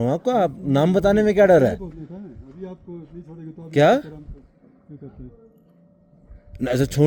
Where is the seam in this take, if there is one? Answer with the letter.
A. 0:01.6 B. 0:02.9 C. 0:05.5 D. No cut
D